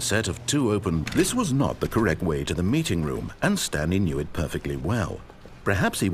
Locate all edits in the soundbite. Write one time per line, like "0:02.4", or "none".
0:01.0